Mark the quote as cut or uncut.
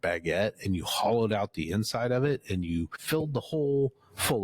cut